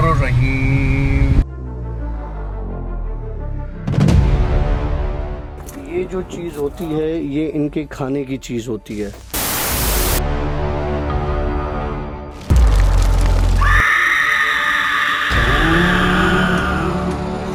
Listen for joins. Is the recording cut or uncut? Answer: uncut